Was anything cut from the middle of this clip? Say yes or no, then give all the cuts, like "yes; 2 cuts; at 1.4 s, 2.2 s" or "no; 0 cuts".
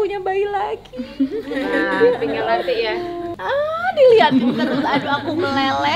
no; 0 cuts